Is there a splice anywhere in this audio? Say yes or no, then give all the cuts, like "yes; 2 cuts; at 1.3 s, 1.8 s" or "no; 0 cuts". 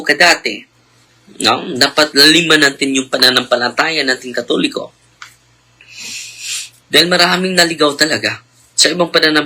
no; 0 cuts